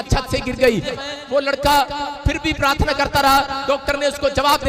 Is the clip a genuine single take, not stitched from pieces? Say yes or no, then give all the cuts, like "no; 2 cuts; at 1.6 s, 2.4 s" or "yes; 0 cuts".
no; 1 cut; at 1.0 s